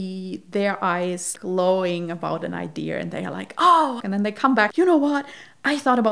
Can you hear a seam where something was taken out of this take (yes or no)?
yes